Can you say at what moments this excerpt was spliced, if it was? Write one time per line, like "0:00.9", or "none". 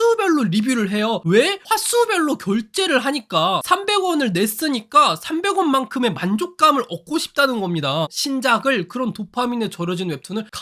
0:01.6
0:08.1